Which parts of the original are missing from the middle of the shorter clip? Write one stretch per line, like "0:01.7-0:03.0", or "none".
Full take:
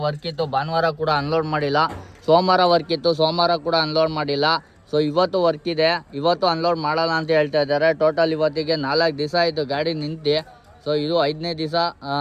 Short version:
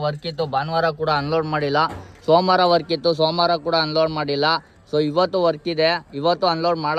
none